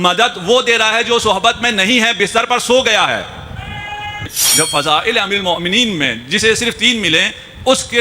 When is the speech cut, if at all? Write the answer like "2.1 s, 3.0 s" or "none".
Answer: 4.3 s